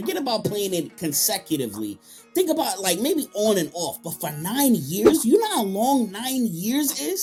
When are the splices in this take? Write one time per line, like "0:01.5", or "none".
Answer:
none